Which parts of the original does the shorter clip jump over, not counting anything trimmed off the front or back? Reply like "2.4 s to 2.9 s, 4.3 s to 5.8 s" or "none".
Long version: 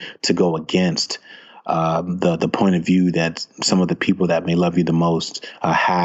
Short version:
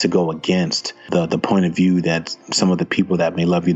1.3 s to 2.1 s